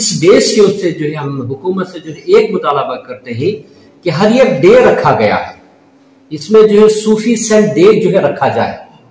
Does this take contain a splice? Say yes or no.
no